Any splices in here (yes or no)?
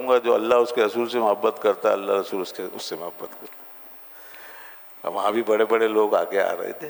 no